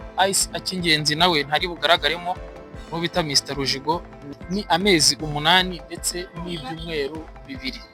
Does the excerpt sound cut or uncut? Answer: cut